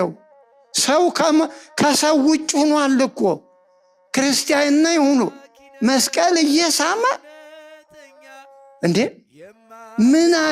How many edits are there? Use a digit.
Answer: 0